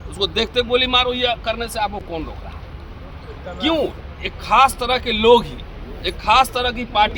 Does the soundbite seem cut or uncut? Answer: uncut